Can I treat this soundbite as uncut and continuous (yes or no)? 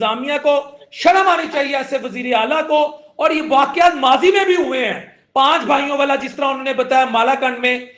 yes